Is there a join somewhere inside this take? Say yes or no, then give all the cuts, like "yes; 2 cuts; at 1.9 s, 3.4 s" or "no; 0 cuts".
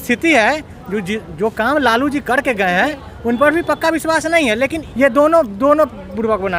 yes; 1 cut; at 4.8 s